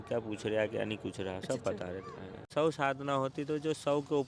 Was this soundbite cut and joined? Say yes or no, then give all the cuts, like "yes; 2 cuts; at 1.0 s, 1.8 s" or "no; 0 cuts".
yes; 1 cut; at 2.5 s